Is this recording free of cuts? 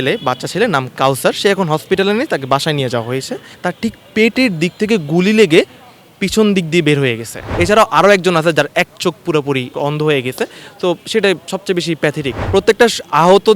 no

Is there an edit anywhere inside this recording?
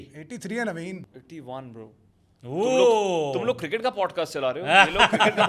yes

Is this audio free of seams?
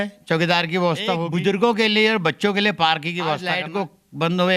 no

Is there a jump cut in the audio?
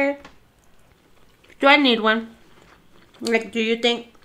no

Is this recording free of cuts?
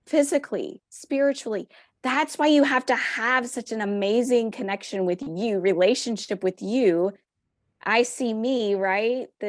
yes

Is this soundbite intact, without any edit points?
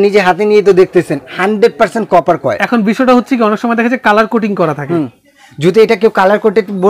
yes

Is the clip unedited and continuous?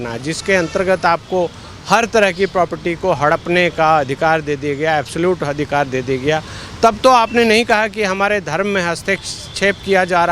yes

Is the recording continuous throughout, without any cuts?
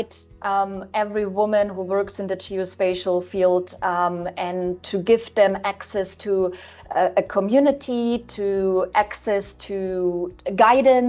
yes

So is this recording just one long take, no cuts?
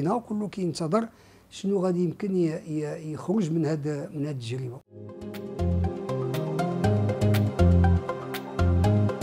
yes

